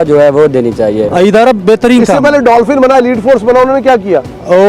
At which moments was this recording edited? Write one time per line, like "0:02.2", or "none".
0:01.1